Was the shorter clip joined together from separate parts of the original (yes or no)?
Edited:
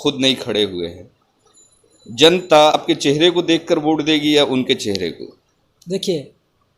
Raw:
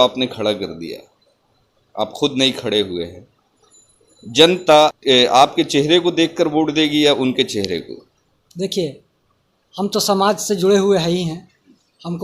yes